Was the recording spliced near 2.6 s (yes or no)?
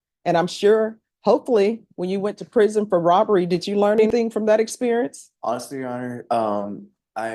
no